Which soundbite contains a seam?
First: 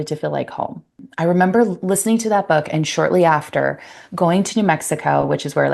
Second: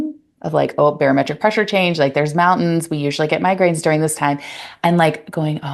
first; 1 cut; at 0.9 s

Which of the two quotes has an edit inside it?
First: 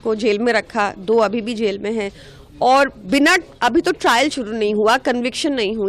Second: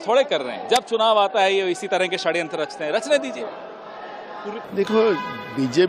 second; 1 cut; at 4.7 s

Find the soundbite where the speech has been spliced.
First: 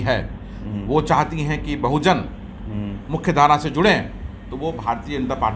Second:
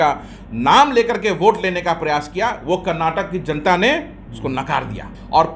second; 1 cut; at 4.6 s

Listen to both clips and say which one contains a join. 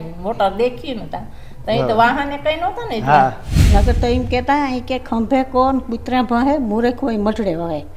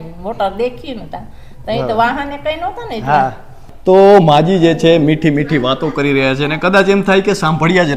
first; 1 cut; at 3.5 s

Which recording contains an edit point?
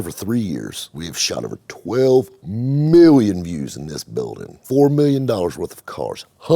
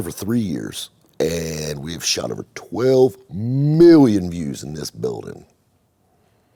first; 2 cuts; at 1.0 s, 4.5 s

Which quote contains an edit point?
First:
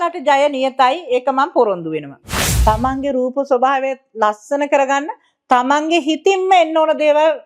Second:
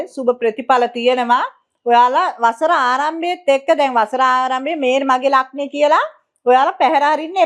first; 1 cut; at 2.5 s

